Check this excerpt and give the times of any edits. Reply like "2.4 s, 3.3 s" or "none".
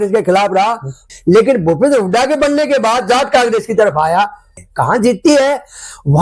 0.9 s, 4.5 s